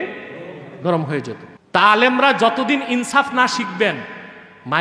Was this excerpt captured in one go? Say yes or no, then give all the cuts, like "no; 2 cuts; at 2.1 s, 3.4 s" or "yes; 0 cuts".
no; 1 cut; at 1.5 s